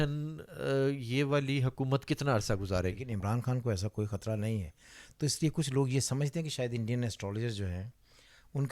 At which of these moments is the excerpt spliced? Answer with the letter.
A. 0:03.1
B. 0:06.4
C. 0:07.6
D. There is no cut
A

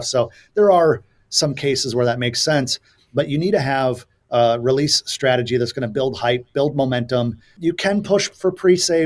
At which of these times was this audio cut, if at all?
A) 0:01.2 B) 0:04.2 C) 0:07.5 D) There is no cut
C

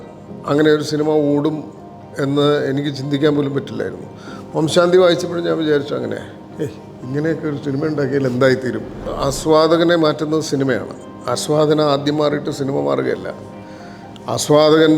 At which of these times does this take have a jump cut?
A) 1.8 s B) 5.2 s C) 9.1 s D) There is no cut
C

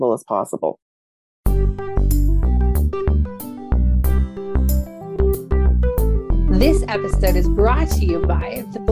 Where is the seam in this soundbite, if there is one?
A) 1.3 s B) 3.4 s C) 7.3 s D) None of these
A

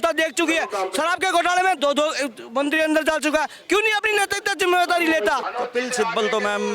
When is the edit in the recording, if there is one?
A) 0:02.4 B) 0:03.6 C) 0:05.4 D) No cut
C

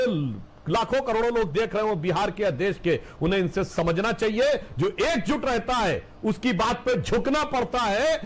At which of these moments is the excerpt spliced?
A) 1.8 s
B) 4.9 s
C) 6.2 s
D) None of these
D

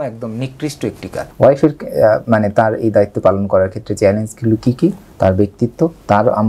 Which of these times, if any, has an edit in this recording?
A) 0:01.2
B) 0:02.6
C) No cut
A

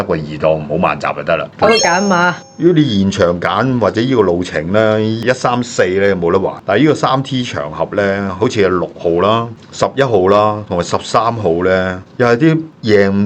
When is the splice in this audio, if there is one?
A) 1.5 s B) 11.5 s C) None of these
A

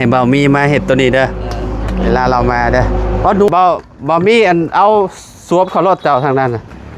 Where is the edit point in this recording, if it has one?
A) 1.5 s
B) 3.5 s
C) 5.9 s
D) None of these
B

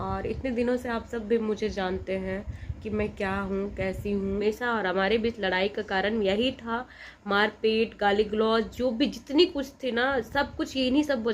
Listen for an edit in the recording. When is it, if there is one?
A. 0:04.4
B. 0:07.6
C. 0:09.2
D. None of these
A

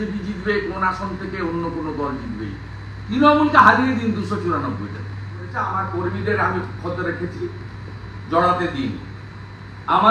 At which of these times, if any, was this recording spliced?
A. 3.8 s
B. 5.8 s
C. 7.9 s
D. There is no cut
B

